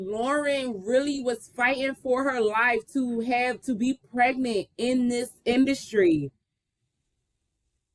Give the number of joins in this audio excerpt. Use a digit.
0